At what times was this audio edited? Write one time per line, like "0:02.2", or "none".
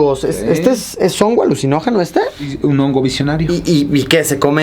0:02.5
0:03.5